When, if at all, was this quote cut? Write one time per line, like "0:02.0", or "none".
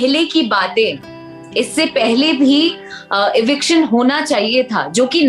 none